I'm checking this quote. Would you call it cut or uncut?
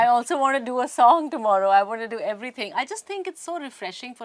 uncut